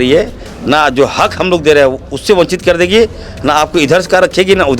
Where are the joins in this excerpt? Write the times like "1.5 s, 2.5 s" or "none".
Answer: none